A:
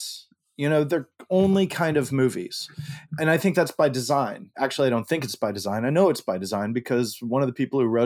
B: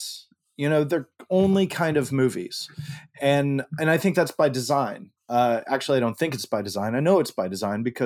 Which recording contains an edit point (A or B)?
A